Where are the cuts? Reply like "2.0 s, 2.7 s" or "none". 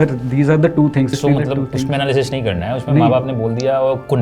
1.1 s